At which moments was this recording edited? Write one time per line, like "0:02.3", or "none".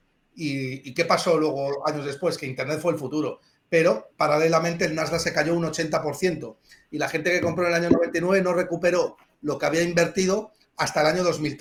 none